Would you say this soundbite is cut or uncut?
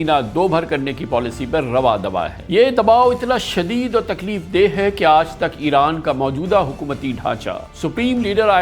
cut